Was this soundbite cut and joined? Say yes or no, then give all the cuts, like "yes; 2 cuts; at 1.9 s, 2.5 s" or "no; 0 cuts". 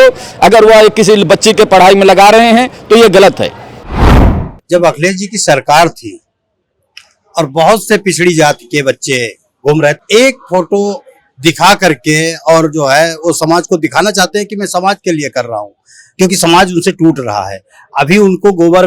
yes; 2 cuts; at 4.1 s, 10.0 s